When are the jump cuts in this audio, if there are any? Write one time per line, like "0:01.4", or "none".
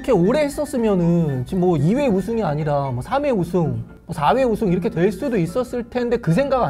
none